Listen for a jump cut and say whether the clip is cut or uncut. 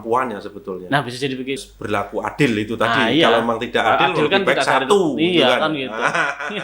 cut